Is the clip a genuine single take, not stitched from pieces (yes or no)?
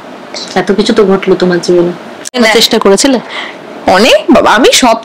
no